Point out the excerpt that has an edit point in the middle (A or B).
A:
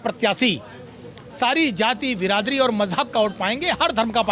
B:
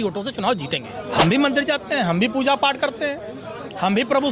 B